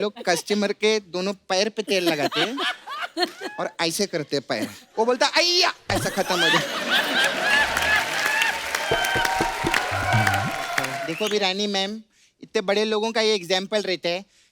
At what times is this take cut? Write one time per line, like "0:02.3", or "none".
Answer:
0:11.0